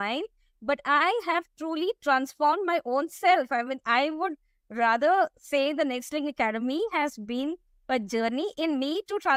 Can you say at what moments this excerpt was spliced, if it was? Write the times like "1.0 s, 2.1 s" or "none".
none